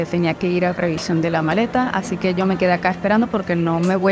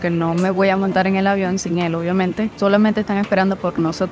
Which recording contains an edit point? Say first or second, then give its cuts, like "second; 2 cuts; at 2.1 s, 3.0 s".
second; 1 cut; at 2.5 s